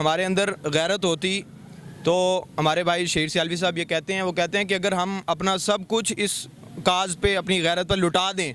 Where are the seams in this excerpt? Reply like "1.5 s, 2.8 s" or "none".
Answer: none